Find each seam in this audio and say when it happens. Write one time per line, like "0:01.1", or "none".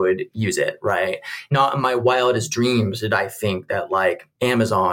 0:01.5